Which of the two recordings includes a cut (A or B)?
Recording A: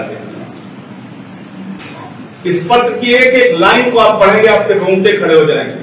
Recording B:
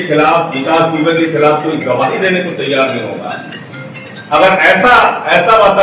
A